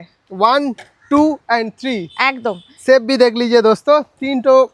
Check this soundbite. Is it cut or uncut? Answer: uncut